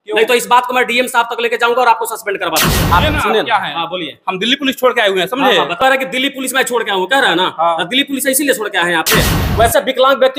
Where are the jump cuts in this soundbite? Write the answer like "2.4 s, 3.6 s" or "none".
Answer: 2.8 s, 5.8 s, 9.4 s